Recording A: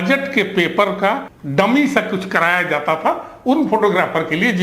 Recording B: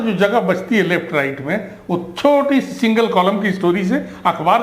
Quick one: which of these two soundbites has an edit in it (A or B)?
A